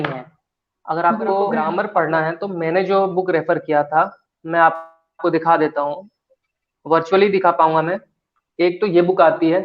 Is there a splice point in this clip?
yes; 1 cut; at 1.6 s

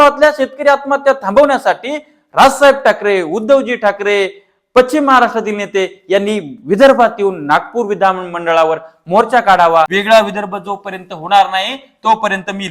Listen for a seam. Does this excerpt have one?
yes; 1 cut; at 9.9 s

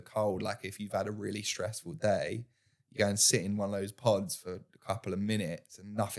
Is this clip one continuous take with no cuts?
yes; 0 cuts

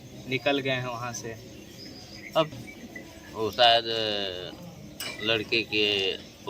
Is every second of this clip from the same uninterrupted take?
no; 1 cut; at 2.5 s

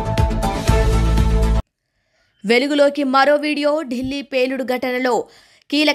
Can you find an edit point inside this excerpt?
yes; 1 cut; at 1.4 s

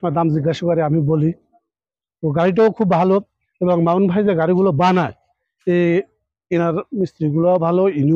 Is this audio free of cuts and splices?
yes; 0 cuts

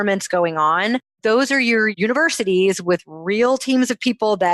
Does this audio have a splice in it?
yes; 2 cuts; at 1.1 s, 1.9 s

